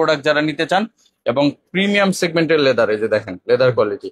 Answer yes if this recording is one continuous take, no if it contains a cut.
yes